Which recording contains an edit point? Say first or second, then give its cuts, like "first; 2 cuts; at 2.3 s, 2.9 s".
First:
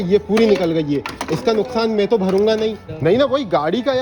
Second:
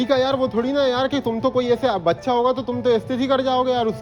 first; 1 cut; at 2.9 s